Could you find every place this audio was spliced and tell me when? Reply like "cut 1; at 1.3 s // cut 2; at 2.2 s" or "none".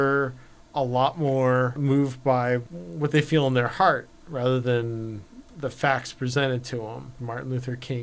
cut 1; at 1.8 s // cut 2; at 2.8 s // cut 3; at 7.1 s